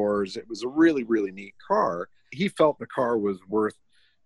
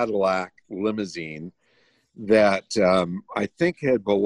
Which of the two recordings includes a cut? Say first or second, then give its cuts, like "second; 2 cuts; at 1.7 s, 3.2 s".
first; 1 cut; at 2.3 s